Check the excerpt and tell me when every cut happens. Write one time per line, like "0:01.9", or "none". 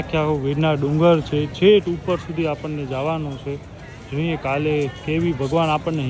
none